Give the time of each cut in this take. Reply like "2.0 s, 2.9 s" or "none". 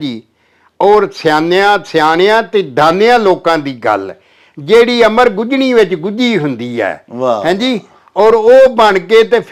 none